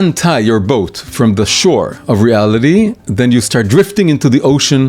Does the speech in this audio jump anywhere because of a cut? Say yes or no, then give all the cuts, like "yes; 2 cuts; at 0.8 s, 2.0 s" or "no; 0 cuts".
yes; 1 cut; at 1.1 s